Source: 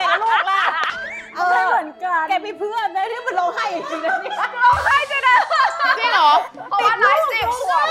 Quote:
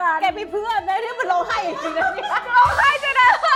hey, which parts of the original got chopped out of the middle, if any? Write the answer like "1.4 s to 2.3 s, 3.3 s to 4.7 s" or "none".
none